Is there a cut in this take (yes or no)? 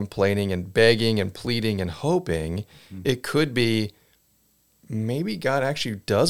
no